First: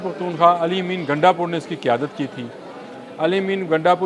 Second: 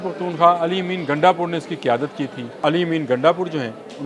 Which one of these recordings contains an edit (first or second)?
second